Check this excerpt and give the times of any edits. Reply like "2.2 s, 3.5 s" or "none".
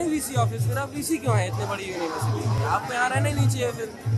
none

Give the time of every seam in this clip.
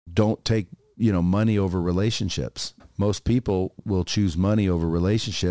2.7 s, 3.8 s

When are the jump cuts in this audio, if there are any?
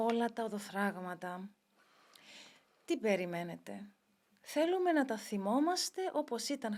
none

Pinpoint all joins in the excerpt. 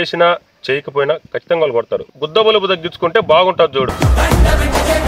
2.1 s

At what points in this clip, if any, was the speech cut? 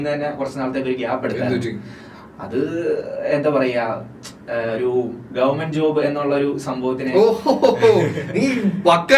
none

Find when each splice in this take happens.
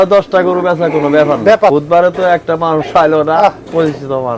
1.7 s

